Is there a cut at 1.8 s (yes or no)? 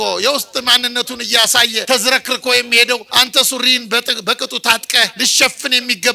yes